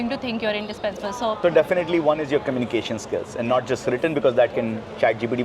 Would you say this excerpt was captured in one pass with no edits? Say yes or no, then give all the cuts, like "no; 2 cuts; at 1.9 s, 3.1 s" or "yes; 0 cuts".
no; 1 cut; at 1.4 s